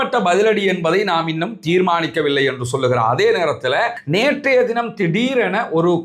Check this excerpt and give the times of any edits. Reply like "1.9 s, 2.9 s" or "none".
4.0 s